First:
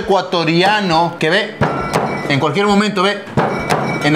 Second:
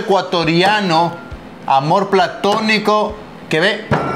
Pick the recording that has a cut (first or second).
first